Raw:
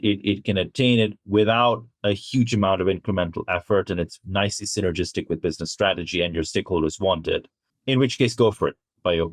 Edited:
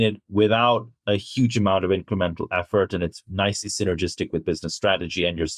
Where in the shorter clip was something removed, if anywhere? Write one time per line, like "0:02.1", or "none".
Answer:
none